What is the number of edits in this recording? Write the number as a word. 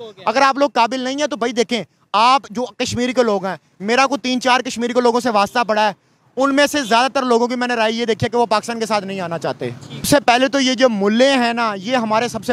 one